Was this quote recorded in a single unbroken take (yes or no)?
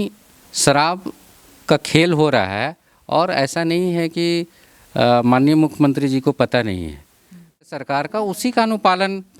no